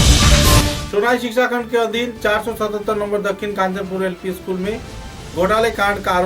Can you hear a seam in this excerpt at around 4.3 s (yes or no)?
no